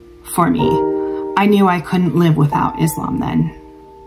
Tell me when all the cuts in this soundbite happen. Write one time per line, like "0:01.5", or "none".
none